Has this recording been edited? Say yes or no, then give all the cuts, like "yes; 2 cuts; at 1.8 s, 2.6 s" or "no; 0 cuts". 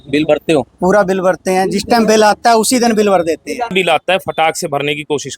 yes; 1 cut; at 3.7 s